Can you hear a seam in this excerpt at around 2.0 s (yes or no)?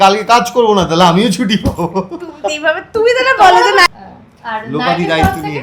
no